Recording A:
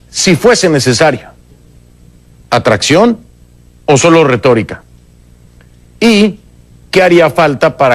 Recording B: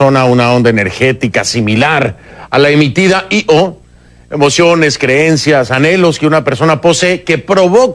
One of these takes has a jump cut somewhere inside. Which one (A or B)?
B